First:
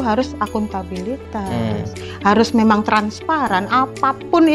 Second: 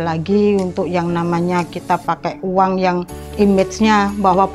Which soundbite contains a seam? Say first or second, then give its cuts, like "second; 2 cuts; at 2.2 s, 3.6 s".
second; 1 cut; at 3.2 s